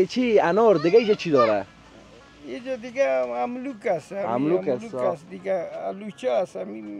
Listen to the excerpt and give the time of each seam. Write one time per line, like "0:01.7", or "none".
none